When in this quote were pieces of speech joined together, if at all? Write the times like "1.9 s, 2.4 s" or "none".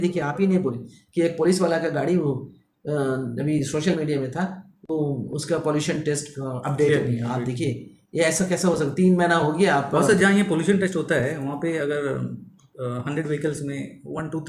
none